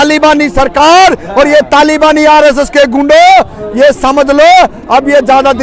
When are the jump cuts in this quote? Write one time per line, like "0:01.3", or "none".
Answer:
none